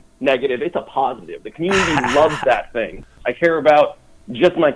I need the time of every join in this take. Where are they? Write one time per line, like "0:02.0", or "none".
0:03.2